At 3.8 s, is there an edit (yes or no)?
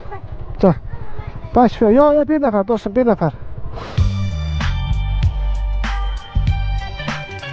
yes